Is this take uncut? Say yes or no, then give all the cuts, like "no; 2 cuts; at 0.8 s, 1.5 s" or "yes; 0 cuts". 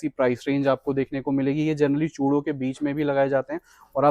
yes; 0 cuts